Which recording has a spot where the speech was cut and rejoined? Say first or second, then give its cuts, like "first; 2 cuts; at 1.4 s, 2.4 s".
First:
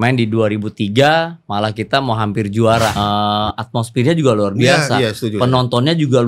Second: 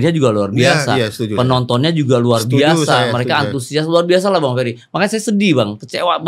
first; 1 cut; at 2.9 s